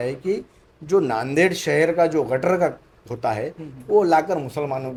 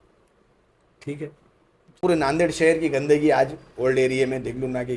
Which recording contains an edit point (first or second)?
second